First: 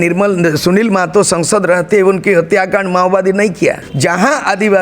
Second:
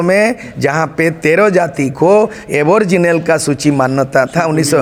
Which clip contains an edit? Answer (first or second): first